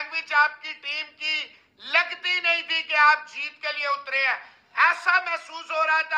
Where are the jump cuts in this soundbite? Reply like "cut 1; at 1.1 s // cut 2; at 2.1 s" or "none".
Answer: none

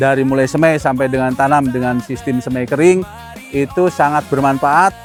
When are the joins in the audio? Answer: none

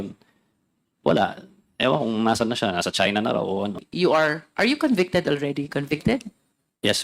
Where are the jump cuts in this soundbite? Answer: cut 1; at 3.8 s

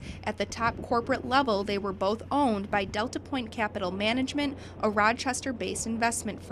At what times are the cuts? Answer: none

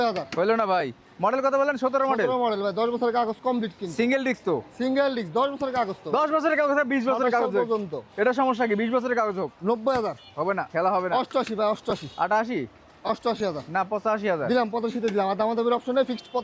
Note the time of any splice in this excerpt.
none

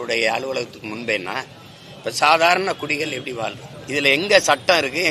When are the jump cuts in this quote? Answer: cut 1; at 3.7 s

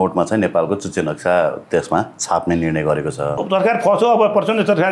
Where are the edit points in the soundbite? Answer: cut 1; at 3.4 s

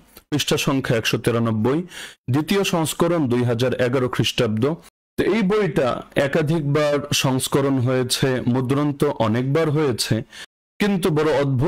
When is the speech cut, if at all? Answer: cut 1; at 4.9 s

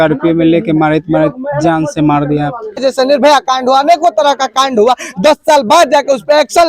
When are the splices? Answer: cut 1; at 2.8 s

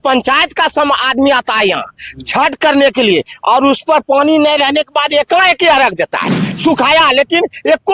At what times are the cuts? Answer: cut 1; at 6.2 s

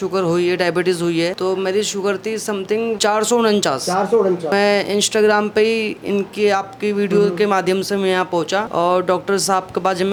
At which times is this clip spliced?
none

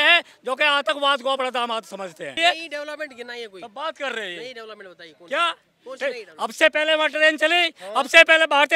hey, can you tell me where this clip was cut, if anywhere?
cut 1; at 2.3 s

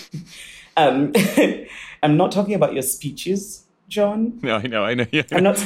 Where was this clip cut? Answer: cut 1; at 2.0 s

